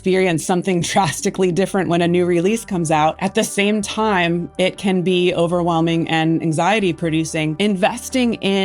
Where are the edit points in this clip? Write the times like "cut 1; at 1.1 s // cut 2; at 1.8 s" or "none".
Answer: cut 1; at 3.2 s // cut 2; at 7.5 s